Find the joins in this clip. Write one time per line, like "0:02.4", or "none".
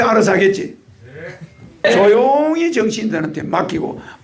0:01.8